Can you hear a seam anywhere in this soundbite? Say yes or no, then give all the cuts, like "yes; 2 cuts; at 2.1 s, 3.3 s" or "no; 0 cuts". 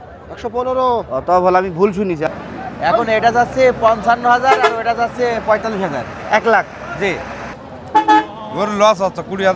yes; 2 cuts; at 2.2 s, 7.5 s